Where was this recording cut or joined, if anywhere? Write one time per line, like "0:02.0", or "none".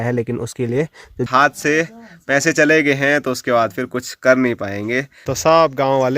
0:01.3
0:05.2